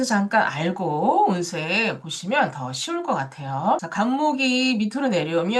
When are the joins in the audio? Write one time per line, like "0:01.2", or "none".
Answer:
0:03.9